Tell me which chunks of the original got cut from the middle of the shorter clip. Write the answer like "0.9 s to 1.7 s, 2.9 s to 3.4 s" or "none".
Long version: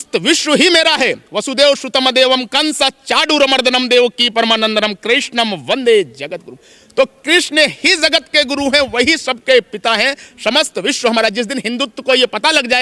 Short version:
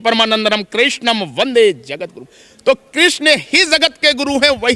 none